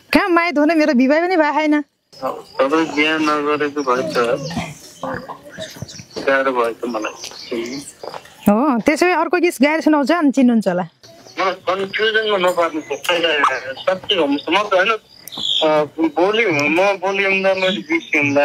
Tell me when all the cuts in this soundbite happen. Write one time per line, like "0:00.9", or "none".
none